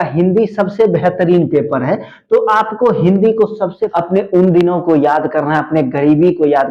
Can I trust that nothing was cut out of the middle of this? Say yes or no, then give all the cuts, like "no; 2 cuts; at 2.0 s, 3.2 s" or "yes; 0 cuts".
no; 1 cut; at 3.8 s